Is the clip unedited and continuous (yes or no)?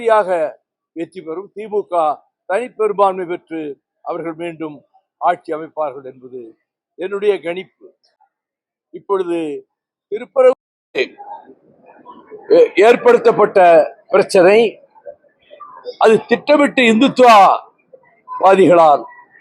yes